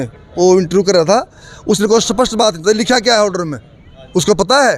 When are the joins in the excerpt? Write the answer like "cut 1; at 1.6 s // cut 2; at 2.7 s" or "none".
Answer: none